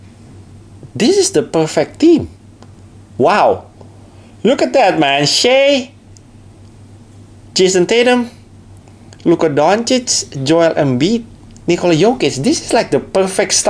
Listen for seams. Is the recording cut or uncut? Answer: uncut